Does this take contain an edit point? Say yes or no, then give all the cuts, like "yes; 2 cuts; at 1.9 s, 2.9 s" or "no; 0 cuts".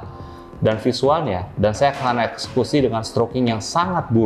no; 0 cuts